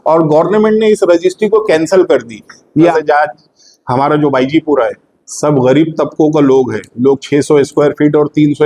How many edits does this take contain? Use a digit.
1